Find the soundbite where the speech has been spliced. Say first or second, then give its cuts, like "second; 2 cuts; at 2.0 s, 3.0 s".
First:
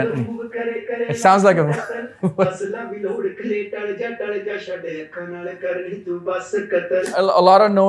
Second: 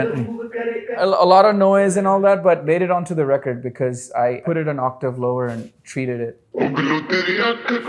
second; 3 cuts; at 0.9 s, 2.6 s, 4.4 s